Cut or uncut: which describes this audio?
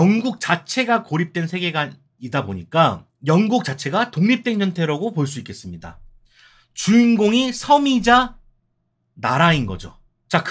uncut